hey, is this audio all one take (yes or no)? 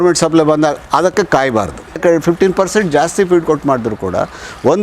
no